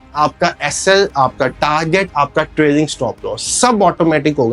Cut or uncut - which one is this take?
uncut